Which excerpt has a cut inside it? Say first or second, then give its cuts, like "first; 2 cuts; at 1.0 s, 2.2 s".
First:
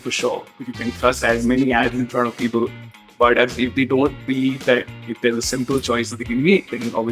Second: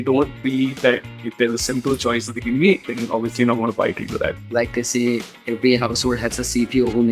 second; 1 cut; at 4.4 s